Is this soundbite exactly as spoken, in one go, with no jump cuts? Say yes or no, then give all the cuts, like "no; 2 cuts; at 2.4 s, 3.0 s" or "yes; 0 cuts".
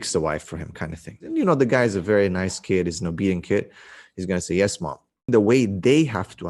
no; 2 cuts; at 1.2 s, 5.3 s